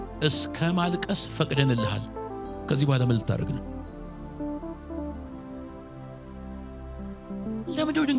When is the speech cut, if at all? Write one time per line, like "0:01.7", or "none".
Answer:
none